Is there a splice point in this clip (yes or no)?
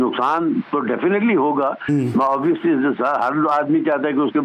no